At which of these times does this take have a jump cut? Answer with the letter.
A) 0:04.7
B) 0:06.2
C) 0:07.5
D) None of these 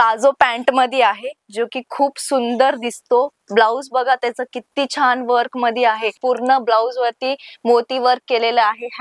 B